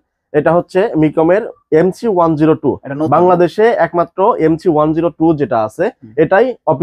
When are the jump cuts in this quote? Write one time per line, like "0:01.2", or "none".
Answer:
none